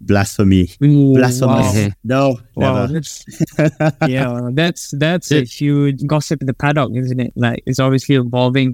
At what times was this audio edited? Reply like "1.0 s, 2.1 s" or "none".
6.0 s